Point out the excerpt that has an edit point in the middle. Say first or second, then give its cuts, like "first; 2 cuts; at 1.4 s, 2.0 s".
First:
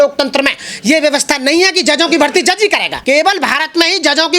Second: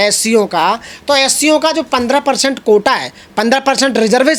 first; 1 cut; at 2.9 s